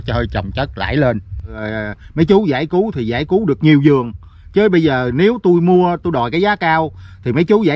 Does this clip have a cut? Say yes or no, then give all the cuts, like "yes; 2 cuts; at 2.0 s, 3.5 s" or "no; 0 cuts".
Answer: yes; 1 cut; at 1.6 s